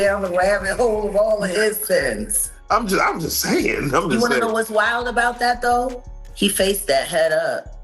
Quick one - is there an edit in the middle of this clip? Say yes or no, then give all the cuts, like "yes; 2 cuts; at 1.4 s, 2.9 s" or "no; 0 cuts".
no; 0 cuts